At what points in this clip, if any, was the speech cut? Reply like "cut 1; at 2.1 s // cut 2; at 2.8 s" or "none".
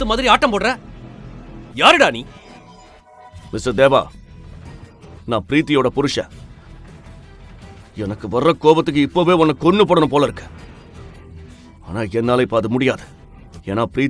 cut 1; at 2.3 s